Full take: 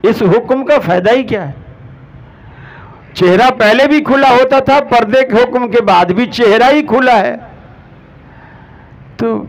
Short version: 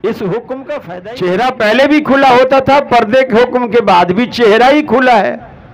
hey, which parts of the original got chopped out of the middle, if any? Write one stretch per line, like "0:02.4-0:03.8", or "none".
0:00.9-0:02.9

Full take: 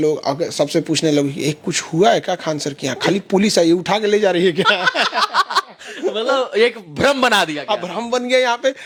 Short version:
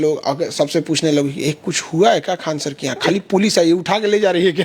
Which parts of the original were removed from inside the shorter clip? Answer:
none

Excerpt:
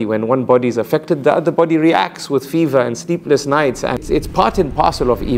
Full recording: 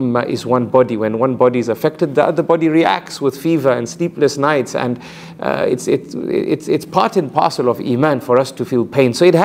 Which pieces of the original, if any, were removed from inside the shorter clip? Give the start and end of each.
0:04.9-0:06.6

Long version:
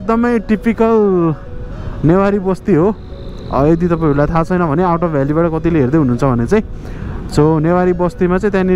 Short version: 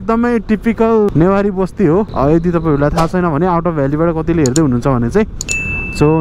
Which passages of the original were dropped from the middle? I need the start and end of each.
0:01.1-0:02.0
0:03.0-0:03.5

